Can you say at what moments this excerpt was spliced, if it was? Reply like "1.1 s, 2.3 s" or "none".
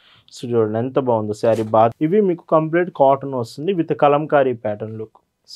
1.9 s